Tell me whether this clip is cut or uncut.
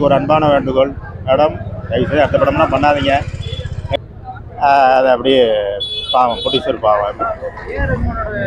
uncut